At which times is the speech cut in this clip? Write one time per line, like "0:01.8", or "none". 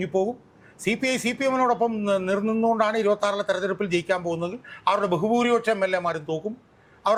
none